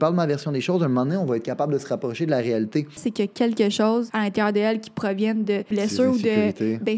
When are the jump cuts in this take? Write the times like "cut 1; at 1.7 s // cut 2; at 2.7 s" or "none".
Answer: cut 1; at 3.0 s // cut 2; at 4.1 s // cut 3; at 5.7 s